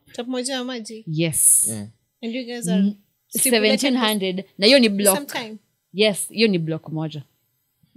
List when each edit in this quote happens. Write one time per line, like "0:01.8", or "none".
none